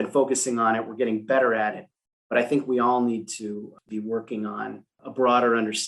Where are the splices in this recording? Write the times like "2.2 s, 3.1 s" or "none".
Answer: 3.8 s, 4.9 s